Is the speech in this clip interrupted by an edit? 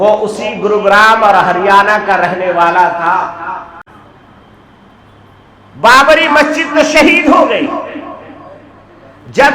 yes; 1 cut; at 3.8 s

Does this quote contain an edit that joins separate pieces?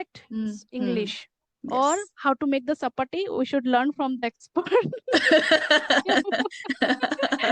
no; 0 cuts

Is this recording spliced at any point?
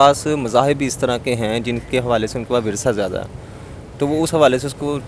no; 0 cuts

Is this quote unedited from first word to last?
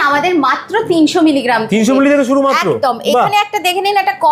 yes; 0 cuts

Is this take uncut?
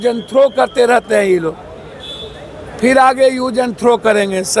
yes; 0 cuts

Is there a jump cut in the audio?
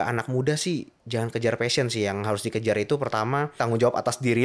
yes; 2 cuts; at 1.0 s, 3.6 s

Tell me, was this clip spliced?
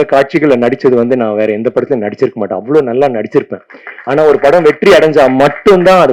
no; 0 cuts

